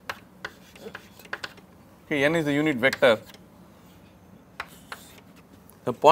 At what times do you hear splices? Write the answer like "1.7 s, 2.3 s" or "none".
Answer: 2.6 s